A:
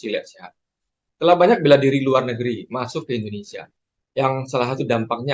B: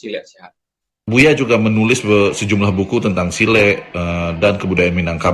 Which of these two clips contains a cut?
B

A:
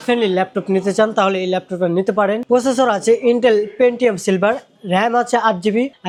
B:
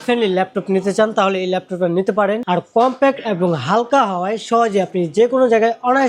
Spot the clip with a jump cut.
B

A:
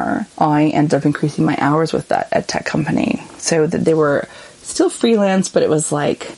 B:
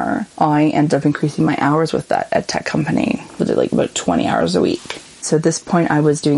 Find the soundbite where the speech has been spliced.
B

